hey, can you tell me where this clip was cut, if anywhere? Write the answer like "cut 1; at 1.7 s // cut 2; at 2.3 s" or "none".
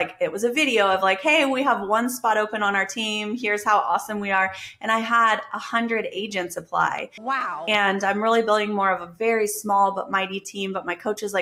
none